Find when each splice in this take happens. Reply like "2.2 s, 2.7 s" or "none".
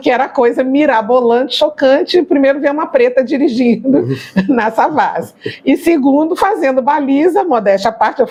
none